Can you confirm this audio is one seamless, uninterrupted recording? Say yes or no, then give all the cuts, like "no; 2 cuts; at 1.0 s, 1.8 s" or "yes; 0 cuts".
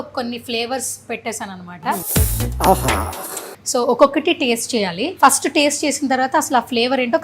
no; 3 cuts; at 2.1 s, 3.5 s, 5.0 s